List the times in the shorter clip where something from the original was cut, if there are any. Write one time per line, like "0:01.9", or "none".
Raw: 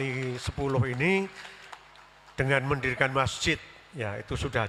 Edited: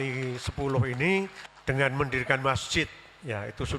0:01.5